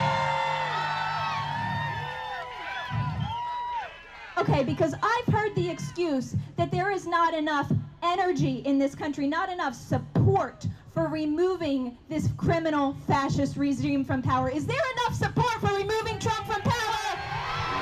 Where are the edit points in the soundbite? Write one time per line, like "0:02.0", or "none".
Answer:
none